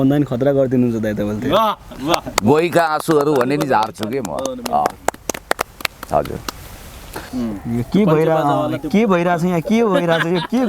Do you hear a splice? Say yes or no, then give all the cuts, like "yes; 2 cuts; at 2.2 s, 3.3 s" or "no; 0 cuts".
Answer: yes; 1 cut; at 7.2 s